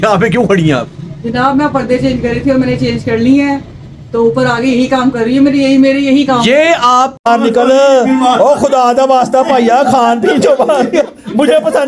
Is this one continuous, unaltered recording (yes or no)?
no